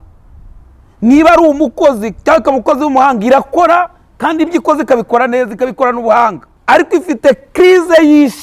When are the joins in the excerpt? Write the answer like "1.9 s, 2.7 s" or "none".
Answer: 6.5 s

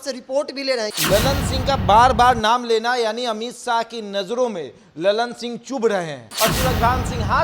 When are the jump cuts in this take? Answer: 0.9 s, 6.3 s

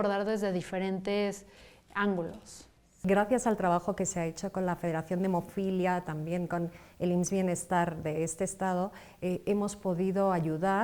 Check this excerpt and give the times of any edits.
3.0 s, 9.0 s

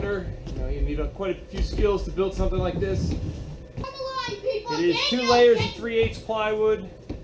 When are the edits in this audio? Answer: 3.8 s

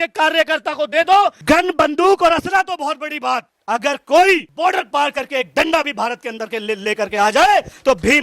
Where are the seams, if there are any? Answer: 1.4 s

